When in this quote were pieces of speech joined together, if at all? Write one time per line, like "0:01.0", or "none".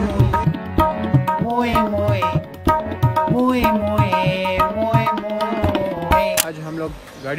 0:06.4

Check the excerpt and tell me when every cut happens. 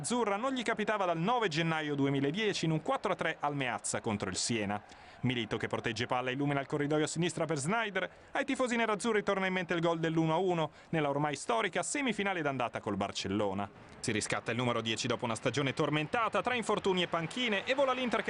0:08.2

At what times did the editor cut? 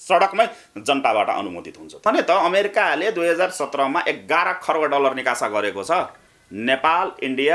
0:02.0

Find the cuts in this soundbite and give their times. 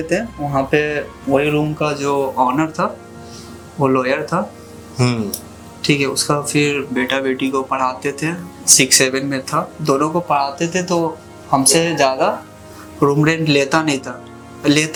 none

